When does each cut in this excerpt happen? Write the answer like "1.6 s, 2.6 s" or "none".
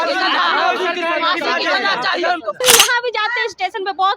2.6 s